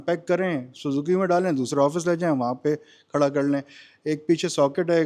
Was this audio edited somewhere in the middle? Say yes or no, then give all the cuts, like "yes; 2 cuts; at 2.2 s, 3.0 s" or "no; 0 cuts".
no; 0 cuts